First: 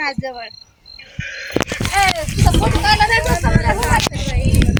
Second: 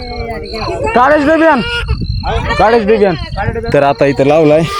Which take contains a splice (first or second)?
second